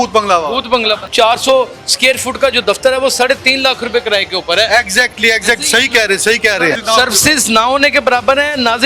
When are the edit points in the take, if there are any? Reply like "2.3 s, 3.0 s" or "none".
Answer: 1.1 s, 6.8 s